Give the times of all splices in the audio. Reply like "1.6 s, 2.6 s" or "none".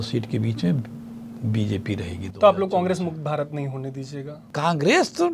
4.4 s